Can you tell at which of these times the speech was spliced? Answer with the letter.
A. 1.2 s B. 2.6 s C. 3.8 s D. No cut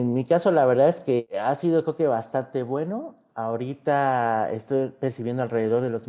A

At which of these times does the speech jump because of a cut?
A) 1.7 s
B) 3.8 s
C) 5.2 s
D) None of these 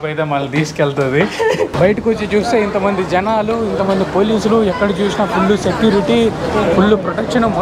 A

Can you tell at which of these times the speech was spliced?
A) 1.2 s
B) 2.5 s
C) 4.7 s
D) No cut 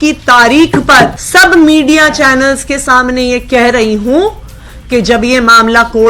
A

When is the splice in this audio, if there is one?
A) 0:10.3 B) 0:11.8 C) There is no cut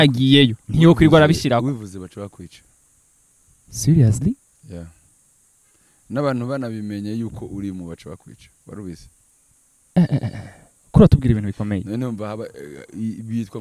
C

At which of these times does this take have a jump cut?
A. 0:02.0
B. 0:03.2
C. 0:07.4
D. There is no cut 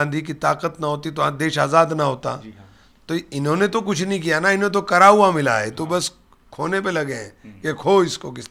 D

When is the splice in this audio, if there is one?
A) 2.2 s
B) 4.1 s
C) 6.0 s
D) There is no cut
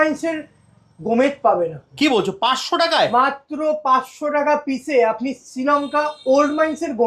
D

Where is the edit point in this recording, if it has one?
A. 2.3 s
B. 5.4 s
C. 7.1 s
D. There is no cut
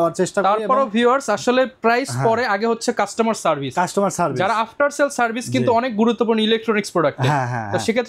D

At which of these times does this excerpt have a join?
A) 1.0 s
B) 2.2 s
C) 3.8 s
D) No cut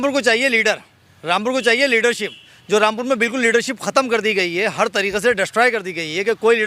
D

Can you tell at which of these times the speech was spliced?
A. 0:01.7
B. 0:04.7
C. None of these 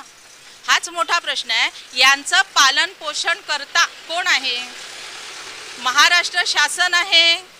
C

